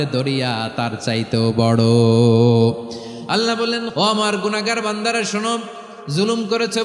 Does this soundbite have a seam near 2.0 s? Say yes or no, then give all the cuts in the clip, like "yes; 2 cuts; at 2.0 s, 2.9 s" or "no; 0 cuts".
no; 1 cut; at 3.9 s